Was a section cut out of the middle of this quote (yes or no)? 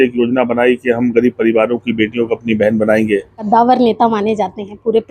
yes